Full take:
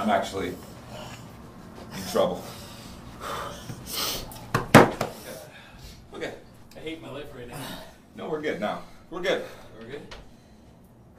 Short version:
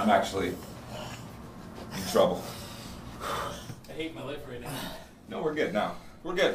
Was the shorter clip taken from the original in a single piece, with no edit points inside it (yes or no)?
no